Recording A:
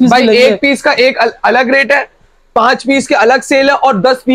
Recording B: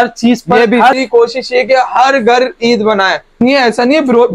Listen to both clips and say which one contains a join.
B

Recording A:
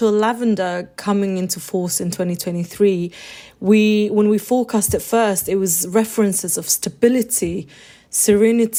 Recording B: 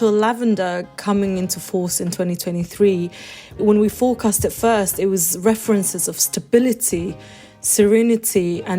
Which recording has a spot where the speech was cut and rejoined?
B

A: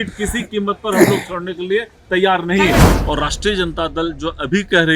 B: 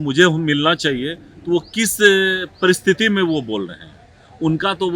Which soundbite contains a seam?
A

